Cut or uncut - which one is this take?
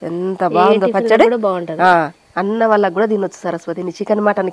cut